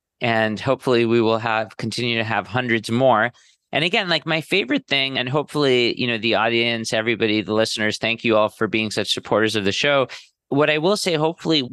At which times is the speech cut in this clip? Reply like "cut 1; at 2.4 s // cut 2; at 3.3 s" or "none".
cut 1; at 5.1 s // cut 2; at 8.5 s